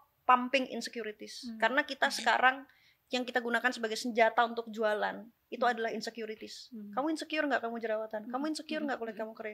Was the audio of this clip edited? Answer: no; 0 cuts

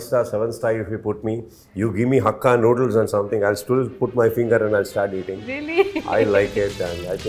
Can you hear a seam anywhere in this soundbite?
no; 0 cuts

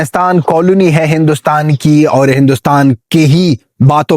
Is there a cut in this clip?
no; 0 cuts

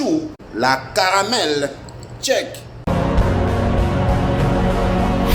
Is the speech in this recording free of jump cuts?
yes; 0 cuts

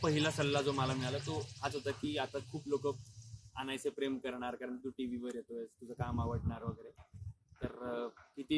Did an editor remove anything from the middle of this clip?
no; 0 cuts

